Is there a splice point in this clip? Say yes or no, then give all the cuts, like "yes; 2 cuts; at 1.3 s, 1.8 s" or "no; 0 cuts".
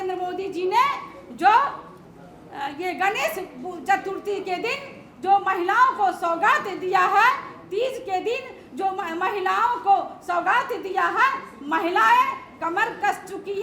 no; 0 cuts